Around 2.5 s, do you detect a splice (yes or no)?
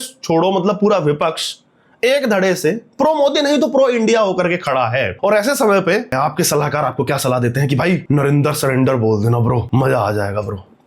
no